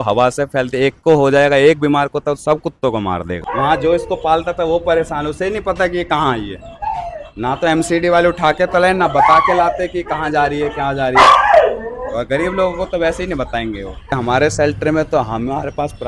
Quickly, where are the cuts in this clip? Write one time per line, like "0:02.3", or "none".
0:03.4
0:14.1